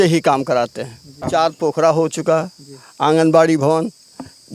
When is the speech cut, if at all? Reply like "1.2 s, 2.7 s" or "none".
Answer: 1.2 s